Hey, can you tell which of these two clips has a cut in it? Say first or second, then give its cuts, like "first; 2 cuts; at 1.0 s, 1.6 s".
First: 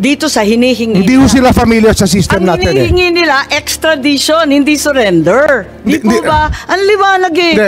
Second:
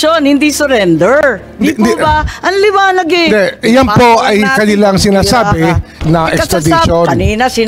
second; 1 cut; at 5.9 s